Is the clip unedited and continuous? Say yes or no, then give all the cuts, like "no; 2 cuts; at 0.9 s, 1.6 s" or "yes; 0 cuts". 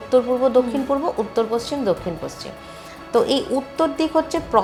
yes; 0 cuts